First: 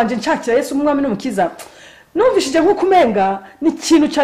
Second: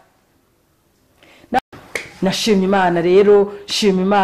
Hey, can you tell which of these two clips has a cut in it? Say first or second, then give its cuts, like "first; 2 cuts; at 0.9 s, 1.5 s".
second; 1 cut; at 1.6 s